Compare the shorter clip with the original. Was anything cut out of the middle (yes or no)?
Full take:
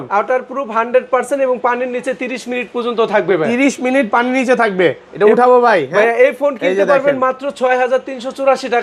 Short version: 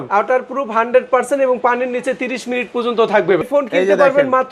yes